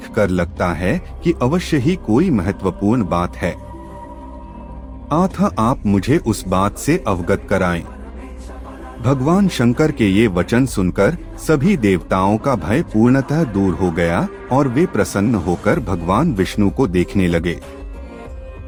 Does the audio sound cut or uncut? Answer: uncut